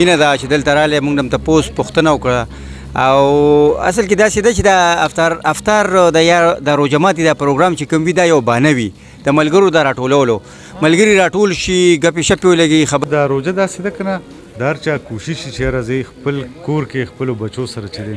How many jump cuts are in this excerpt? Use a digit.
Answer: 1